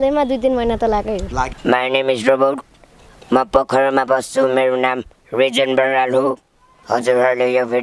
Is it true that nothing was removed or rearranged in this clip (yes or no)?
no